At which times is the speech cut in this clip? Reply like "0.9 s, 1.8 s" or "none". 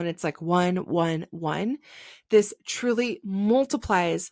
none